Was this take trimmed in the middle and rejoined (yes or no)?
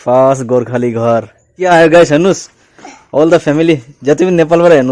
yes